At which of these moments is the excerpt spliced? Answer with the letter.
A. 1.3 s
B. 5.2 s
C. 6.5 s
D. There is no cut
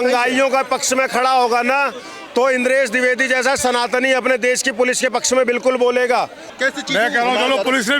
C